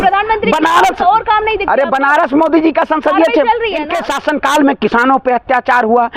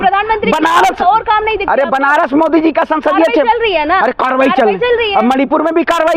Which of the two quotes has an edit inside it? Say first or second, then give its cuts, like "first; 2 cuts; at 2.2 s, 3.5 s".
first; 1 cut; at 3.9 s